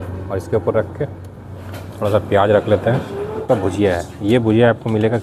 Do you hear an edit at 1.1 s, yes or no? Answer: no